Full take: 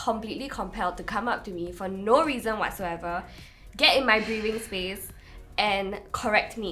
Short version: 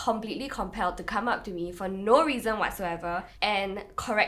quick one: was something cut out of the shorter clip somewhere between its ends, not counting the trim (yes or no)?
yes